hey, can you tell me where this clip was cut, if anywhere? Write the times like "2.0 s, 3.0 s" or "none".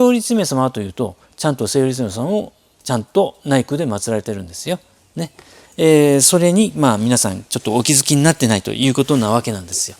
none